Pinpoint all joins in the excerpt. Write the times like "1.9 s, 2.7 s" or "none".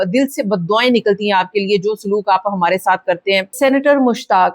3.5 s